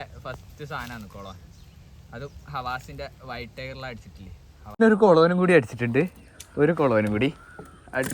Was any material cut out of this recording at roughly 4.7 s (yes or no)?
yes